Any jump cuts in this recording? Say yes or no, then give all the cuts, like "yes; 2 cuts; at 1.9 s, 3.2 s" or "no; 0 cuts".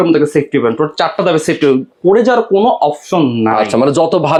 no; 0 cuts